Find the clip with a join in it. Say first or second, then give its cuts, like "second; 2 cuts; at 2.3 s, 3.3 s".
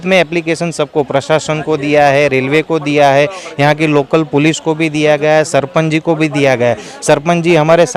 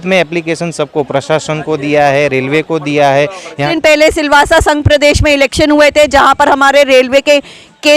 second; 1 cut; at 3.7 s